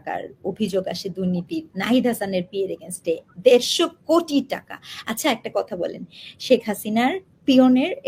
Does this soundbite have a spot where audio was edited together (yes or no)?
no